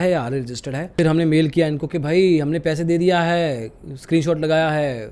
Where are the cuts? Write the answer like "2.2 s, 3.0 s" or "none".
0.9 s

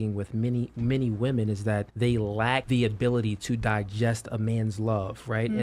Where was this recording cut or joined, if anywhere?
1.9 s, 2.6 s

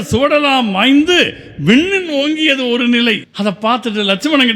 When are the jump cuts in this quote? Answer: none

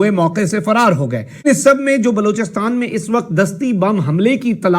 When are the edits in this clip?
1.4 s

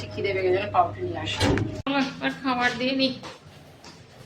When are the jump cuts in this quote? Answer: 1.7 s

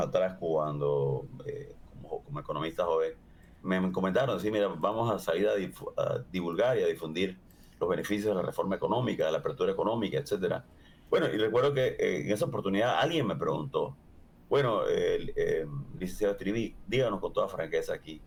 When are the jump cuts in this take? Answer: none

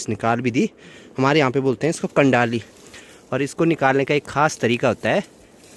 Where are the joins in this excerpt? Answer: none

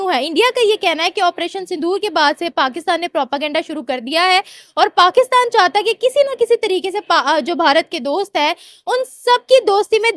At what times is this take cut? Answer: none

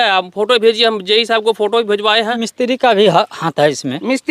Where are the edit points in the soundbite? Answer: 2.4 s

